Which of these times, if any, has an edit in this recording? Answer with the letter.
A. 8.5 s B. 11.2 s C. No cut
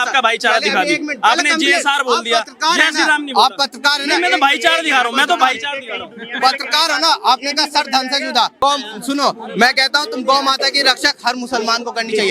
A